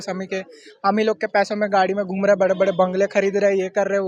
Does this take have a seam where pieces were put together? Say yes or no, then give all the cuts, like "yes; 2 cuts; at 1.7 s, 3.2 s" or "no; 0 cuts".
no; 0 cuts